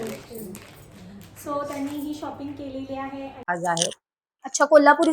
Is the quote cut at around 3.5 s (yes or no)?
yes